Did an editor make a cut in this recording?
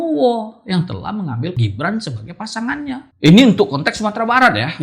yes; 2 cuts; at 1.6 s, 3.1 s

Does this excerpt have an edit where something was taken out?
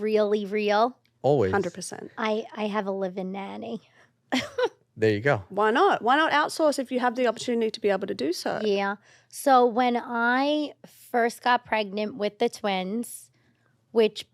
no; 0 cuts

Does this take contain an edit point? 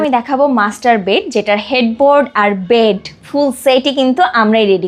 no; 0 cuts

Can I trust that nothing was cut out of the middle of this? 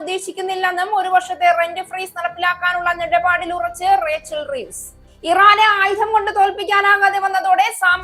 yes; 0 cuts

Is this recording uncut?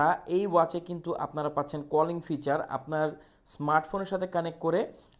yes; 0 cuts

